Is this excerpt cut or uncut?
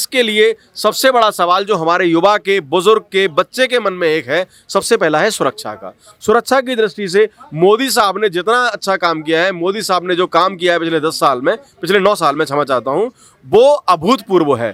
uncut